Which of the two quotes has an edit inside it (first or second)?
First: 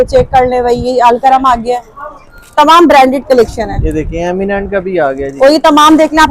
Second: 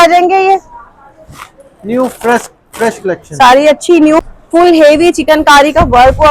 second